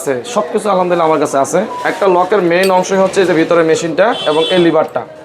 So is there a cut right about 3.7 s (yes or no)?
no